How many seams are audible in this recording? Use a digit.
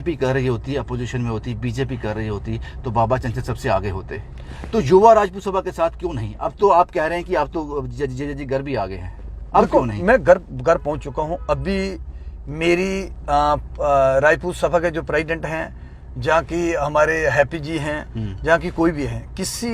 0